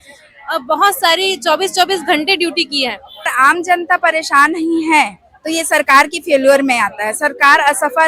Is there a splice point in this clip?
yes; 1 cut; at 3.3 s

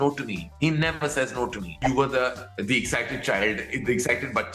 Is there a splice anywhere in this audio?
yes; 1 cut; at 1.8 s

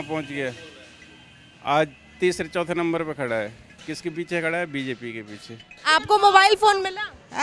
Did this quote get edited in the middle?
yes; 1 cut; at 5.9 s

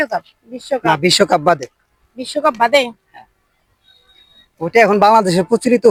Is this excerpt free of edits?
yes; 0 cuts

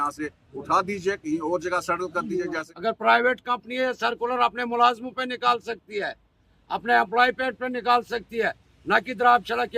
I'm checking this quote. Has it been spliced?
yes; 1 cut; at 2.7 s

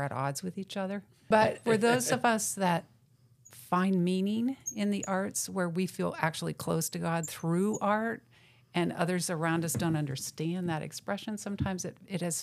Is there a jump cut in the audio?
yes; 1 cut; at 1.5 s

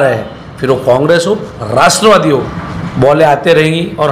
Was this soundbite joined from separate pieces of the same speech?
yes; 1 cut; at 2.6 s

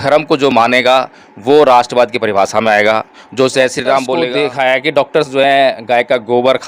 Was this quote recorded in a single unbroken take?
no; 1 cut; at 4.2 s

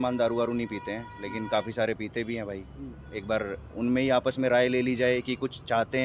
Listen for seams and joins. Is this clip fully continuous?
yes; 0 cuts

